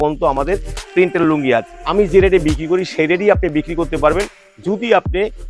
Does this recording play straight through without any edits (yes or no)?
no